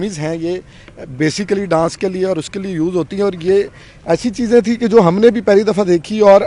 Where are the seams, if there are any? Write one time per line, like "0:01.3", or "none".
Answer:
none